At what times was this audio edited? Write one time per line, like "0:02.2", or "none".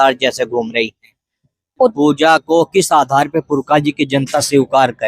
0:01.9